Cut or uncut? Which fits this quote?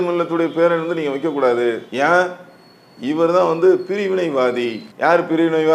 cut